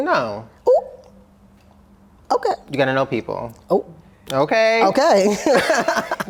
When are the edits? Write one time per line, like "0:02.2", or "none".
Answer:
none